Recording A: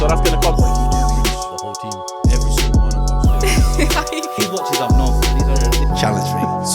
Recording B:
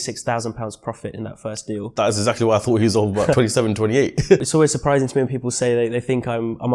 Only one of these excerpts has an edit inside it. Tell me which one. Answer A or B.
B